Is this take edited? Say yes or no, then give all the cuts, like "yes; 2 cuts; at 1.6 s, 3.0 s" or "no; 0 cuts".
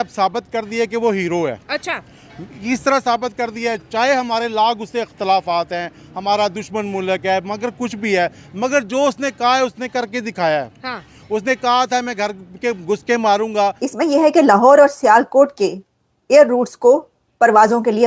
yes; 1 cut; at 13.8 s